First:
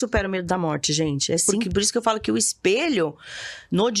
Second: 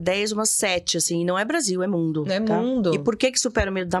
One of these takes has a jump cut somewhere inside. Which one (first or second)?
first